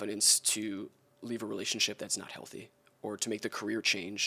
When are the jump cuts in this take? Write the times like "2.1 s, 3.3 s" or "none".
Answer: none